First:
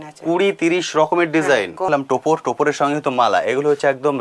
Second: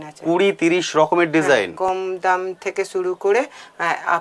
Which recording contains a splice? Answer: first; 1 cut; at 1.9 s

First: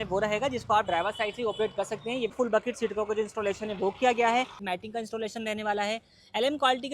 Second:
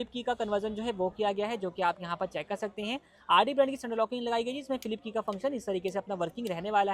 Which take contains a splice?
first; 2 cuts; at 2.3 s, 4.6 s

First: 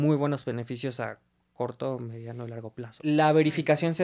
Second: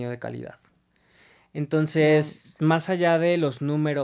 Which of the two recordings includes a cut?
first; 1 cut; at 3.0 s

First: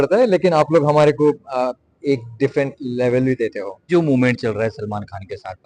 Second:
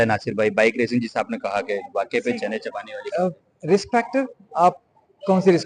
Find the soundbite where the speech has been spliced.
first; 1 cut; at 3.9 s

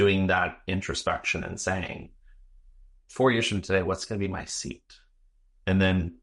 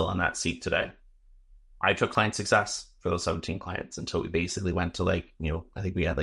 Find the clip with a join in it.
second; 1 cut; at 2.1 s

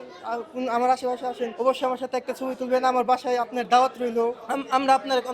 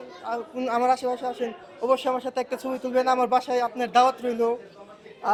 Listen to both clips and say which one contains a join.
first; 2 cuts; at 1.5 s, 4.4 s

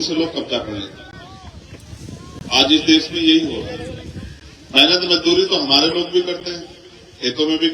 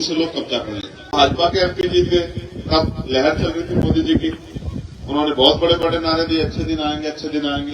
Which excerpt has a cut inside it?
second; 1 cut; at 1.1 s

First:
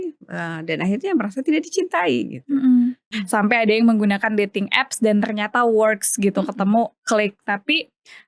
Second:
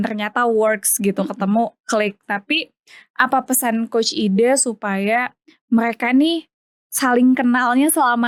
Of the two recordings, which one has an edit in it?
first; 1 cut; at 3.1 s

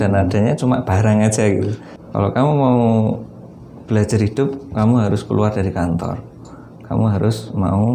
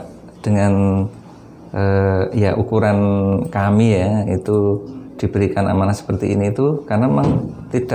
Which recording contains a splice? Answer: first; 1 cut; at 1.8 s

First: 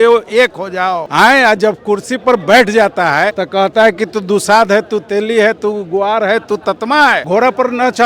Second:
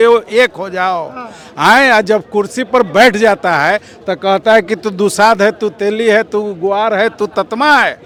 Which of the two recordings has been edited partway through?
first; 3 cuts; at 1.0 s, 3.4 s, 7.2 s

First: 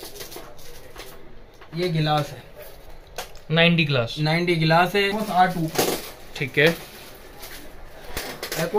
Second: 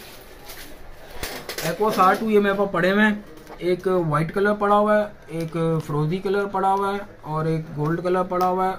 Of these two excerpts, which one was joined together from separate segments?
first; 1 cut; at 5.1 s

